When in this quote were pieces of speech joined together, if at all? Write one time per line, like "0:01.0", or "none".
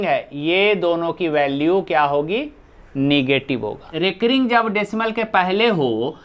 0:03.9

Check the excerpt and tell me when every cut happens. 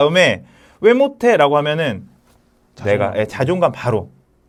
none

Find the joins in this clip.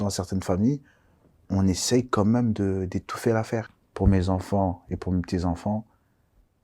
0:03.8

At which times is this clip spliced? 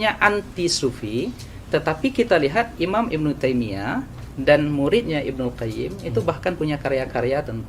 none

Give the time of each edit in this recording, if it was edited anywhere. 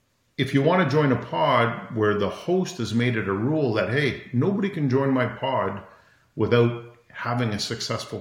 none

